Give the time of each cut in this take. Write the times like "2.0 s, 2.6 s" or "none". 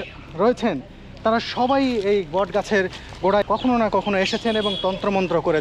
3.5 s